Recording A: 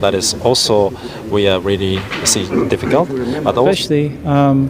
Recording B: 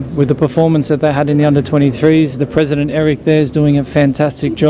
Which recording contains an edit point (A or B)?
A